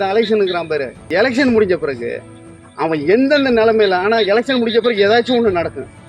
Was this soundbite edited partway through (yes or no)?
yes